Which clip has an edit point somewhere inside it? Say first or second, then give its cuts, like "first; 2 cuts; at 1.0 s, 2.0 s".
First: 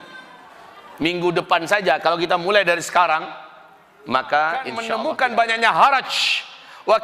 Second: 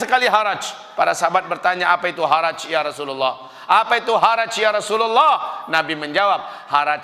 first; 1 cut; at 4.8 s